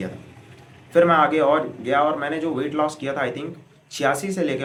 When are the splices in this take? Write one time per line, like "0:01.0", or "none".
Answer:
none